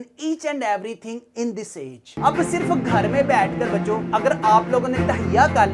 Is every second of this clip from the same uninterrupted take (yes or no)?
no